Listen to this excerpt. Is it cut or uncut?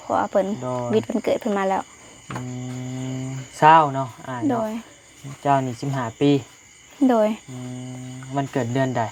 uncut